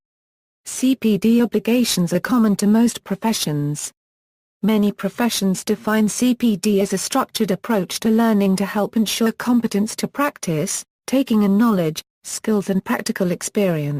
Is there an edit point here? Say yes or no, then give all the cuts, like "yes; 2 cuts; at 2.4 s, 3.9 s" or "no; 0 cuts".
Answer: yes; 1 cut; at 10.0 s